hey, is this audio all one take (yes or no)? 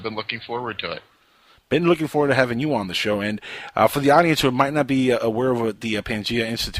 yes